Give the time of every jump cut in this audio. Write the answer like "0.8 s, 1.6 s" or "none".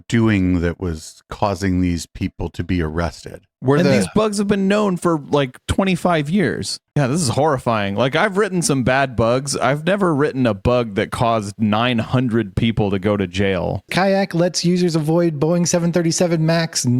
3.4 s, 6.8 s, 13.9 s